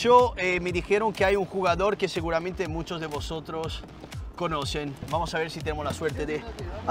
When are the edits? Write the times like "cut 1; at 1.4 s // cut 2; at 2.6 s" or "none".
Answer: none